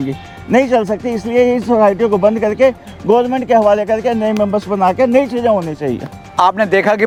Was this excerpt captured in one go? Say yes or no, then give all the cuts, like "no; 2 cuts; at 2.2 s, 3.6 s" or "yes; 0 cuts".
yes; 0 cuts